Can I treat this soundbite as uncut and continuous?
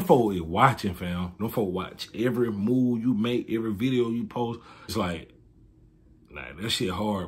no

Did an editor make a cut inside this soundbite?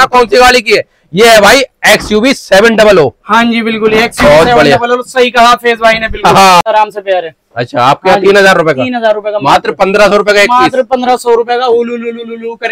yes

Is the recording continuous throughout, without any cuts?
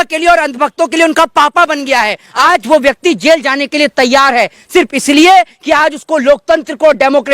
no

